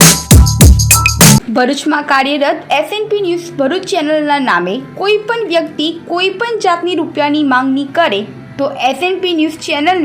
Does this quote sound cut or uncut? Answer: cut